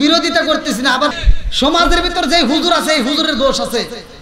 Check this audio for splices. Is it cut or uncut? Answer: cut